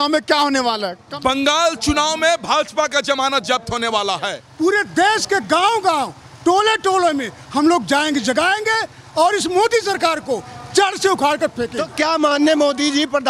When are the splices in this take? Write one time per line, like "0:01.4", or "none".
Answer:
0:01.0
0:04.4
0:11.8

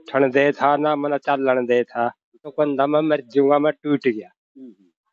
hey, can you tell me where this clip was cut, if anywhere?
0:02.5

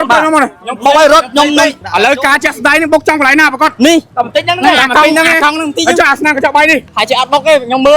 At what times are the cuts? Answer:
0:01.8
0:04.1
0:06.9

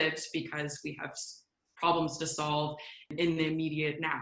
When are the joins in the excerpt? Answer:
0:03.1

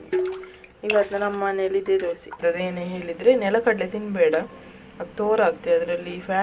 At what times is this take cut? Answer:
0:02.4

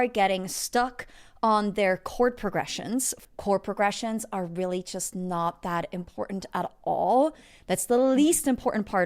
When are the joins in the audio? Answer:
0:03.2

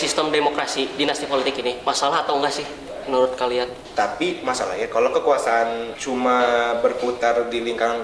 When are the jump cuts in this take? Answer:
0:03.8
0:05.9

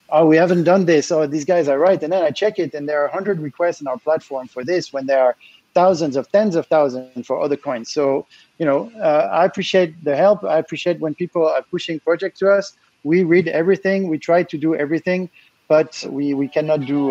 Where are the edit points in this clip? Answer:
0:16.1

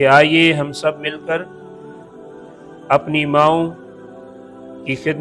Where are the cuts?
none

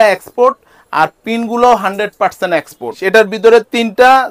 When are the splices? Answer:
0:02.9

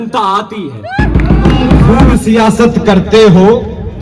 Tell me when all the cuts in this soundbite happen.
0:02.1

